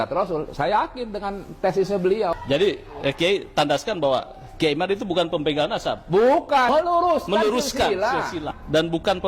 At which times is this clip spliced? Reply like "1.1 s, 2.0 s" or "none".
2.4 s, 6.7 s